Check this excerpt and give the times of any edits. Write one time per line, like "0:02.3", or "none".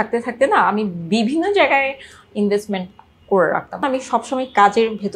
0:03.8